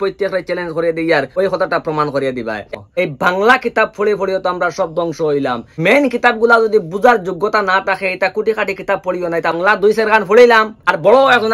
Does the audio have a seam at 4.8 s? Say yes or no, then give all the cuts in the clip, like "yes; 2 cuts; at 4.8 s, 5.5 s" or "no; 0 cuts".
no; 2 cuts; at 2.7 s, 9.6 s